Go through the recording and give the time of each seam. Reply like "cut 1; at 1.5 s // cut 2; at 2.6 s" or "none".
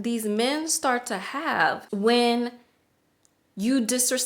cut 1; at 1.8 s